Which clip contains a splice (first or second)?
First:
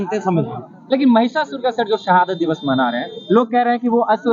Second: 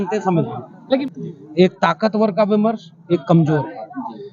second